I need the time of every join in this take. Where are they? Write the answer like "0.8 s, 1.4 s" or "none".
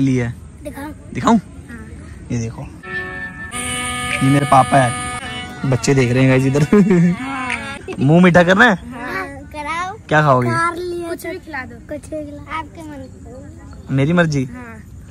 none